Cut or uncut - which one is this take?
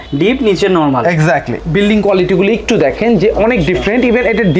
cut